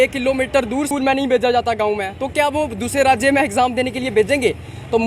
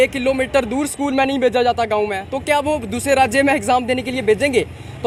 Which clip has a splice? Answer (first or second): first